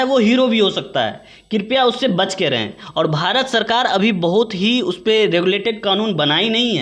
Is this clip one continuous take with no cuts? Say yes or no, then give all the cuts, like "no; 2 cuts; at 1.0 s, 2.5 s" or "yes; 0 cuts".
yes; 0 cuts